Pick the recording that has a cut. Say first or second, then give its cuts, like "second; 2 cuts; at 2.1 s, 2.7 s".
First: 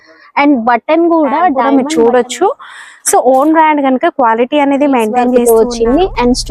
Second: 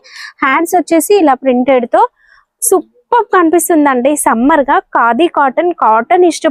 first; 2 cuts; at 1.6 s, 5.4 s